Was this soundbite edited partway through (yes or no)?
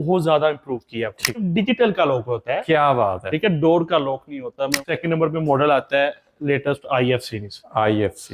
yes